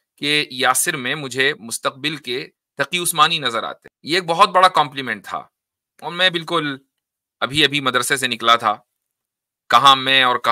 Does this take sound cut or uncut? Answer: cut